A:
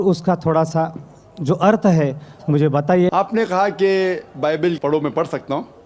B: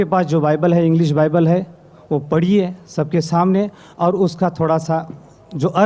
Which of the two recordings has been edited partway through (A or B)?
A